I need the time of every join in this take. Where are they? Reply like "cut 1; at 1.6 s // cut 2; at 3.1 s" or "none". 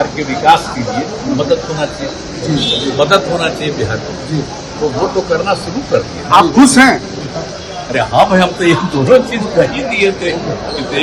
none